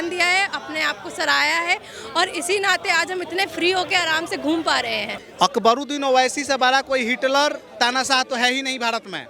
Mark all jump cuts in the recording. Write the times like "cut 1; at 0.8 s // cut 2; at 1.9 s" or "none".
cut 1; at 5.1 s